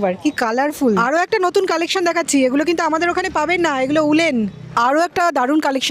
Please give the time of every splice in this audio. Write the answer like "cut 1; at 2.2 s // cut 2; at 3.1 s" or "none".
cut 1; at 1.0 s // cut 2; at 4.6 s